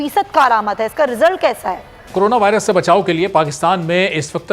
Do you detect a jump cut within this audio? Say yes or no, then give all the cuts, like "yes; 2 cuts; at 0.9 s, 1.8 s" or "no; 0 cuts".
yes; 1 cut; at 1.9 s